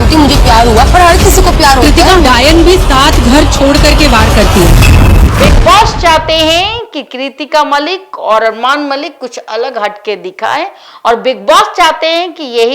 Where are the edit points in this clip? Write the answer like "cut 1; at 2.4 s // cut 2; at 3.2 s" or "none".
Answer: cut 1; at 5.3 s